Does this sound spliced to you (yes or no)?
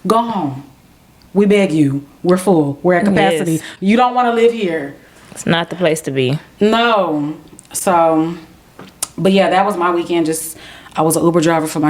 no